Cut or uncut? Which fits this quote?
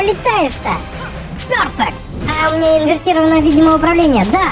cut